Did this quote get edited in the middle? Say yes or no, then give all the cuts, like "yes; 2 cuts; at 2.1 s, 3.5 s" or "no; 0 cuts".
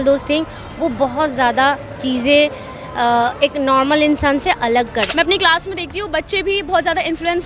yes; 1 cut; at 5.1 s